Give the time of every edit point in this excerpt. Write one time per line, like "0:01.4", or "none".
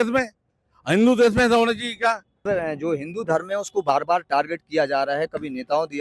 none